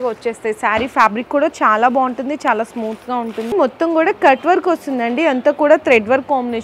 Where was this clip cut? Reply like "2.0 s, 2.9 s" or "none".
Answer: 3.5 s

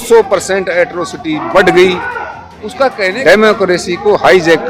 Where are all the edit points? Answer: 3.0 s

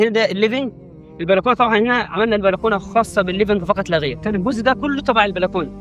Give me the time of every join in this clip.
4.2 s

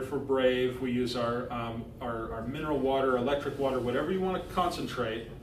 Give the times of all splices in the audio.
none

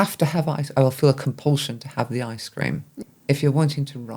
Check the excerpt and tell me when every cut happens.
2.9 s

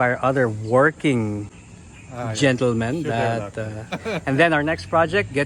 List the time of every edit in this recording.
4.0 s

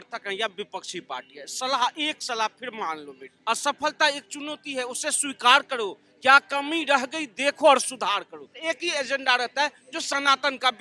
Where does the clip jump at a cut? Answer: 3.2 s, 8.5 s

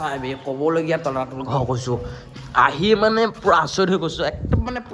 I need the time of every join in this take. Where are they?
none

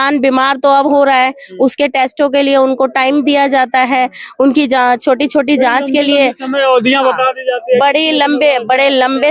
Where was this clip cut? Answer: none

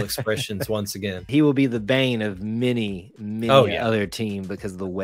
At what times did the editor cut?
1.3 s

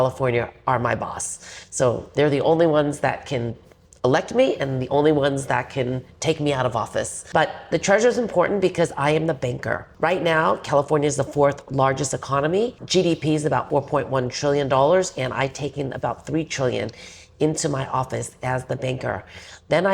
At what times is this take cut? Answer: 7.2 s, 9.8 s, 12.8 s, 13.6 s

